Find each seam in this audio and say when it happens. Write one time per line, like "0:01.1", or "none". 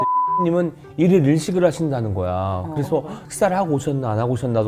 0:03.2